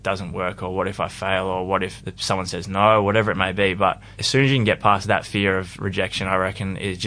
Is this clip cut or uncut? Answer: cut